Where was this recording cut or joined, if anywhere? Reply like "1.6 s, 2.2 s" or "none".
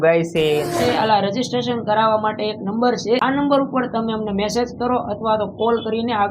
0.8 s, 3.2 s